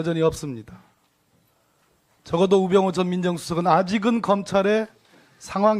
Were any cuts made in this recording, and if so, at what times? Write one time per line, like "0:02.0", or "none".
none